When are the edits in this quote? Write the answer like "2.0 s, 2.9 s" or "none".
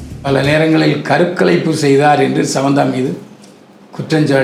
none